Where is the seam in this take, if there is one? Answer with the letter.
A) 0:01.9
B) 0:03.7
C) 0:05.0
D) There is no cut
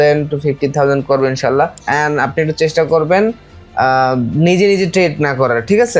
A